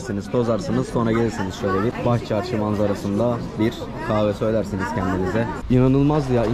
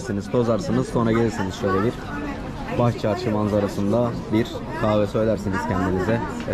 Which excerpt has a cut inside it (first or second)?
first